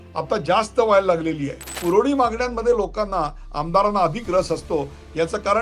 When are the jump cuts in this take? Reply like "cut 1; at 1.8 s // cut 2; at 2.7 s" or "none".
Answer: cut 1; at 1.8 s